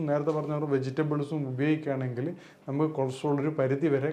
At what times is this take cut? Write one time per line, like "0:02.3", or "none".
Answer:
none